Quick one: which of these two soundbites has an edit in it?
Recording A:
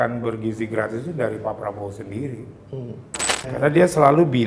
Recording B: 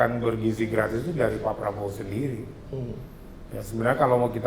A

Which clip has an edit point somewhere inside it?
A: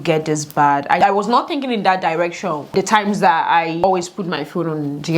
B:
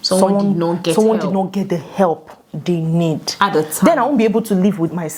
A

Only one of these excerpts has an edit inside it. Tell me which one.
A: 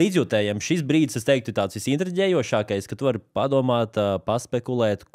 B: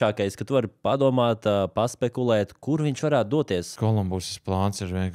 B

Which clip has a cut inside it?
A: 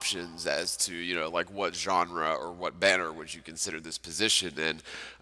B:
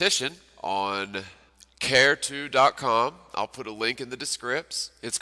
B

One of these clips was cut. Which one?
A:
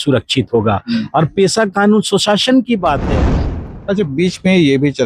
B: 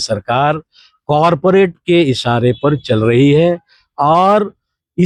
A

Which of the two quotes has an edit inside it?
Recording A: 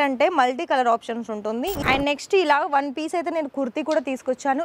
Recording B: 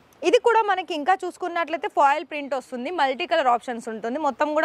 A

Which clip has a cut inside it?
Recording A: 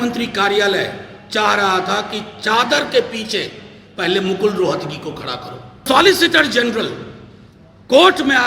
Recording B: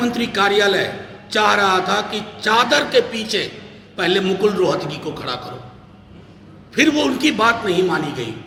A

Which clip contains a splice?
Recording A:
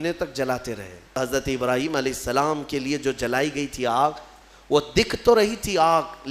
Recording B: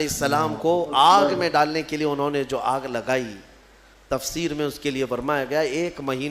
A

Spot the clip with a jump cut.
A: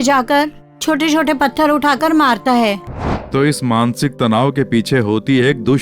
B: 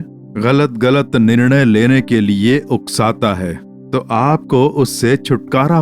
A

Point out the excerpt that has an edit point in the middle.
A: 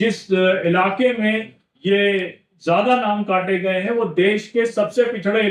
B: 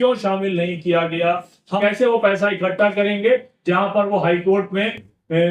B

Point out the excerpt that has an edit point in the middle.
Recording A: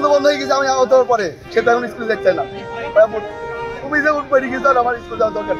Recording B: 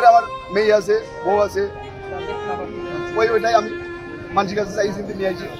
A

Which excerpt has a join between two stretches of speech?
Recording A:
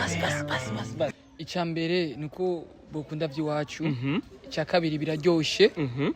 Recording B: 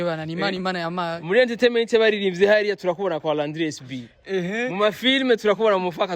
A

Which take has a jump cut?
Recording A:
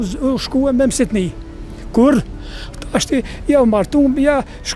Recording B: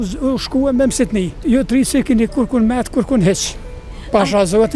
B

